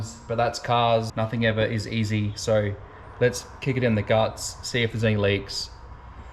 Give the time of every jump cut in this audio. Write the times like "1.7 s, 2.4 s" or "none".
1.1 s